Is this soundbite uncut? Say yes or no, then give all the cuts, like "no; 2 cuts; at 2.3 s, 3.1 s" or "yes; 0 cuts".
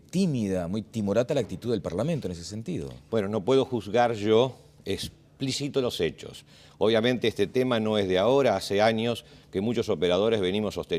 no; 1 cut; at 1.6 s